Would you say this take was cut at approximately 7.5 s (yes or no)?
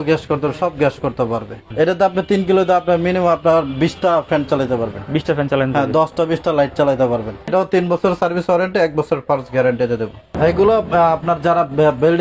yes